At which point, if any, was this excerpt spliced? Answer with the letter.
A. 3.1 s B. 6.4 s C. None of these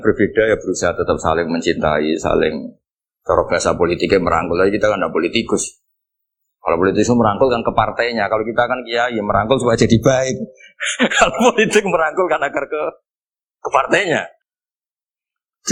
C